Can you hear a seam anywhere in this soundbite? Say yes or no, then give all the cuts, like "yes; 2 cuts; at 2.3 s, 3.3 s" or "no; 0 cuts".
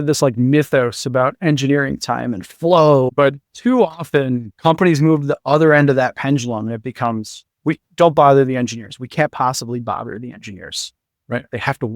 yes; 2 cuts; at 3.1 s, 4.5 s